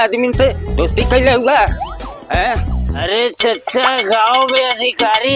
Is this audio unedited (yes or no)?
no